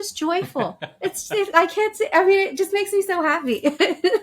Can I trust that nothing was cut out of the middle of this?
yes; 0 cuts

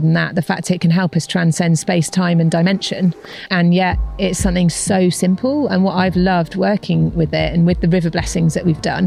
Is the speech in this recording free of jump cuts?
yes; 0 cuts

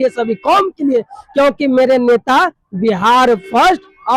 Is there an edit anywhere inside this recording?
no; 0 cuts

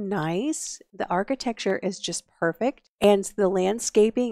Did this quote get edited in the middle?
yes; 2 cuts; at 1.1 s, 2.9 s

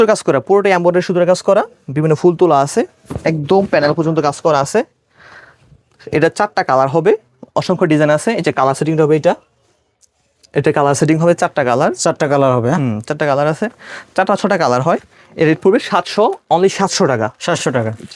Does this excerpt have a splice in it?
no; 0 cuts

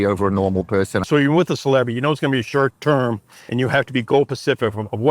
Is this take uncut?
no; 2 cuts; at 1.1 s, 2.8 s

